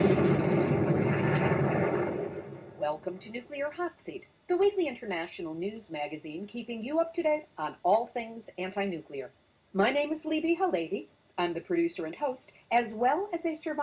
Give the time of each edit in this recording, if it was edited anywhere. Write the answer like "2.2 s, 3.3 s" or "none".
2.9 s